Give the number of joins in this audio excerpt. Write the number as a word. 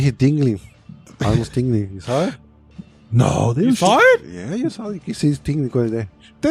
zero